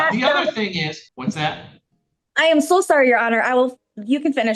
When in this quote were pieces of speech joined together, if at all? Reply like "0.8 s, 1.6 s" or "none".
1.1 s